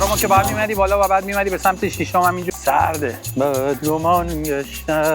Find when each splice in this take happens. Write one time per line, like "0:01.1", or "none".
0:02.5